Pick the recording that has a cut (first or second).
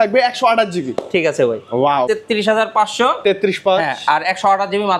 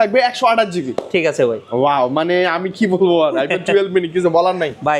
first